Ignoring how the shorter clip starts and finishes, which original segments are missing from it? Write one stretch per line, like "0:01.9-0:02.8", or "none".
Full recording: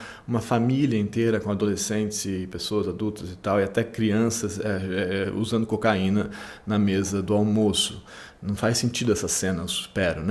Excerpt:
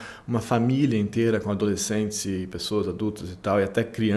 none